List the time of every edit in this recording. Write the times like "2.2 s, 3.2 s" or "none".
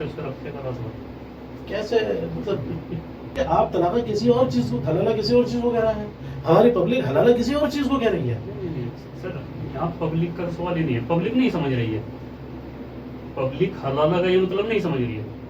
3.3 s